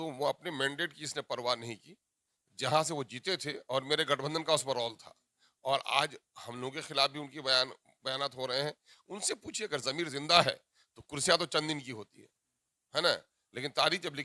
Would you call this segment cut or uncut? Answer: uncut